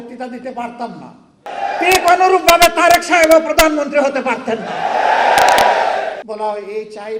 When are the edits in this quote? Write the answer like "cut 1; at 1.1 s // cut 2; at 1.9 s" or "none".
cut 1; at 1.5 s // cut 2; at 6.2 s